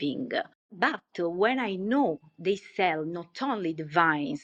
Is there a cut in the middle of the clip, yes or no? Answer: no